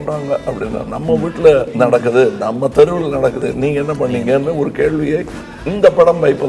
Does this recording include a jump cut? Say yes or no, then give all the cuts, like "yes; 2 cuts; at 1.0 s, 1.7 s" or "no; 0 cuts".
yes; 2 cuts; at 1.7 s, 3.4 s